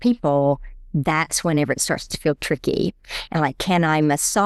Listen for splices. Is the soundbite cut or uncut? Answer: uncut